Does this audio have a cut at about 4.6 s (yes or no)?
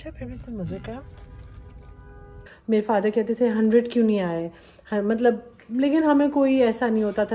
no